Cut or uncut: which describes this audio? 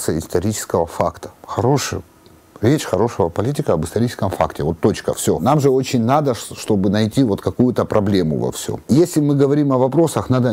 cut